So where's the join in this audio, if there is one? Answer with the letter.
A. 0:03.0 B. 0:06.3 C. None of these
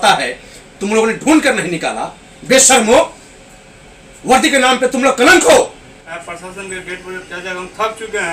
B